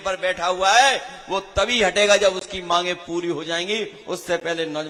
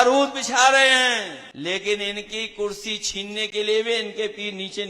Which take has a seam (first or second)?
second